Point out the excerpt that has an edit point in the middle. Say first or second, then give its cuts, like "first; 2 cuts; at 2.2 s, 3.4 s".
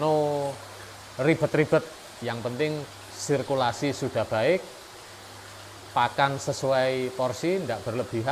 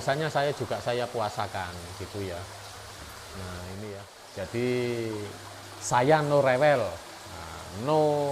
second; 1 cut; at 4.2 s